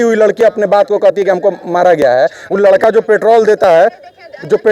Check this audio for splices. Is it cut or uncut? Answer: uncut